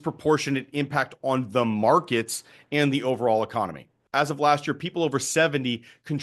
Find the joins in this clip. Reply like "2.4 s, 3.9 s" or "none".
4.0 s